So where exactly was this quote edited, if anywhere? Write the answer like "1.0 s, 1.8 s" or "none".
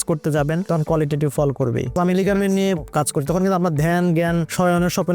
1.9 s